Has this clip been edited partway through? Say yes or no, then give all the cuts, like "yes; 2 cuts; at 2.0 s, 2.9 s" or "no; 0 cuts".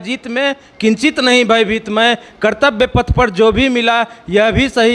no; 0 cuts